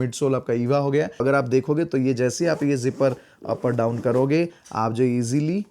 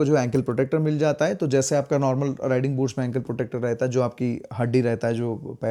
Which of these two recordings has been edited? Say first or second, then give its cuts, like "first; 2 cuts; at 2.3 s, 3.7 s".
first; 1 cut; at 1.2 s